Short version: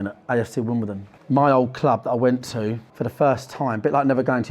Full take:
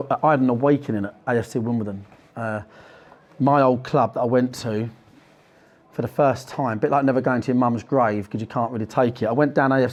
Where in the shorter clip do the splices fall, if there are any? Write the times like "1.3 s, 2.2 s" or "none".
1.1 s, 2.9 s